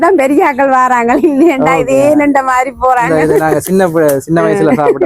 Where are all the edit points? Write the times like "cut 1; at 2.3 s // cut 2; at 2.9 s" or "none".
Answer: none

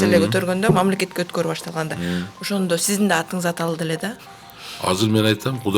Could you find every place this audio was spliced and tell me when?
cut 1; at 4.2 s

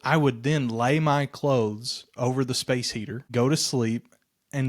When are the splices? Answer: cut 1; at 3.3 s

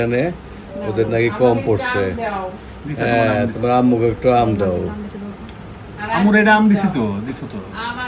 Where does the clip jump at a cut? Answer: none

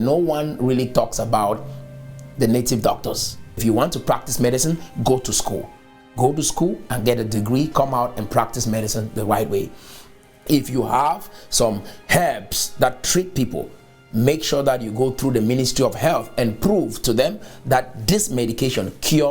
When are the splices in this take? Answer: cut 1; at 3.5 s

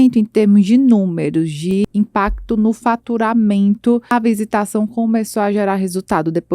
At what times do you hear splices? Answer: cut 1; at 1.8 s // cut 2; at 4.1 s

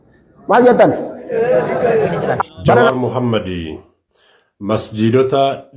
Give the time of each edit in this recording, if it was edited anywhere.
cut 1; at 2.9 s

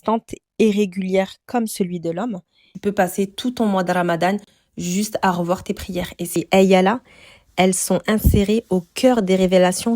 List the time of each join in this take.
cut 1; at 2.6 s // cut 2; at 6.4 s

